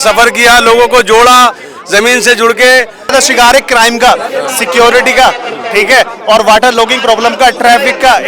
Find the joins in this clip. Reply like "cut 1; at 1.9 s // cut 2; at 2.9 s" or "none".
cut 1; at 3.1 s